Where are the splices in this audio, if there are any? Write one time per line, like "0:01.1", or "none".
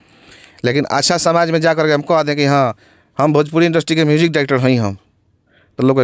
none